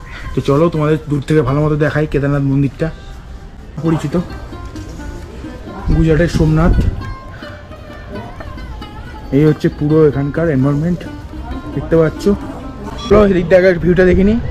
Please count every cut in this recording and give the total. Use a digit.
2